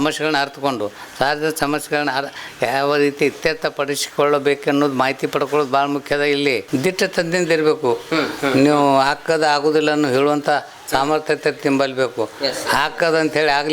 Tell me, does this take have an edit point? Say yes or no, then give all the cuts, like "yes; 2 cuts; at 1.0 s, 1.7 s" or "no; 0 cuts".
yes; 1 cut; at 6.6 s